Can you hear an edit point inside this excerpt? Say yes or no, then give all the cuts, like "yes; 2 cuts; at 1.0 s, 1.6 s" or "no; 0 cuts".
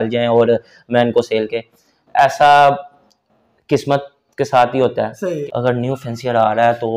yes; 1 cut; at 5.4 s